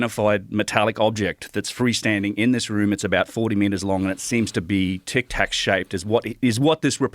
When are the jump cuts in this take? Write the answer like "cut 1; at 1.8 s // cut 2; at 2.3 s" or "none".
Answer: none